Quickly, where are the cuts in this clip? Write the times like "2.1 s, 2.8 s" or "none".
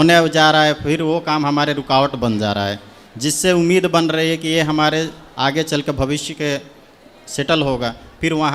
none